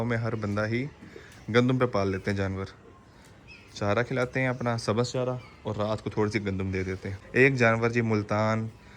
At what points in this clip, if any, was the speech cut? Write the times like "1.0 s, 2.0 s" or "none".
7.1 s